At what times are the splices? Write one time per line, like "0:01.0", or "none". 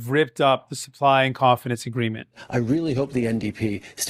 0:02.4

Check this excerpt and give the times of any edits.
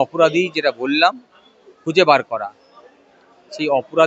none

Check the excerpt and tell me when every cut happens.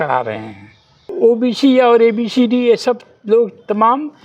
0:01.0

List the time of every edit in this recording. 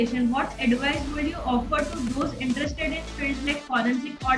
none

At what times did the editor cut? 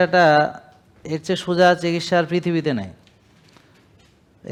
none

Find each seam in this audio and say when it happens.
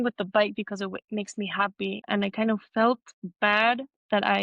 0:02.0

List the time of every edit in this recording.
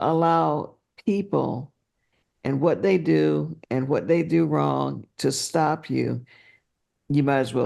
none

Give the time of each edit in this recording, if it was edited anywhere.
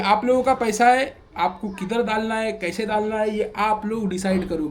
none

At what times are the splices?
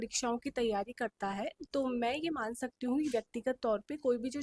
none

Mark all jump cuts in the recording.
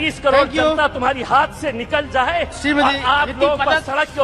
none

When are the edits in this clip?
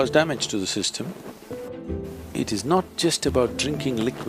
0:01.7

